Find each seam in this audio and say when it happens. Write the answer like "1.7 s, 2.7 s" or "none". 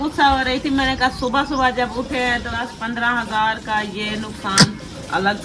2.5 s